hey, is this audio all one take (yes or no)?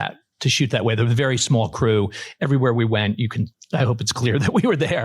no